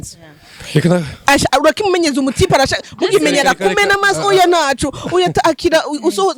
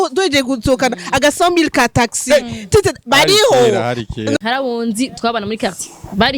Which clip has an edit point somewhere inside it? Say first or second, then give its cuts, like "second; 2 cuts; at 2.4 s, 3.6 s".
second; 1 cut; at 4.3 s